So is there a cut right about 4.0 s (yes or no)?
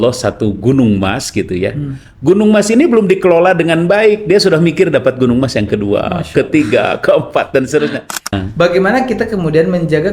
no